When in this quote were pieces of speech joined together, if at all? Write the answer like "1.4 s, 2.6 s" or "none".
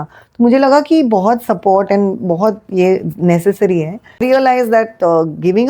4.2 s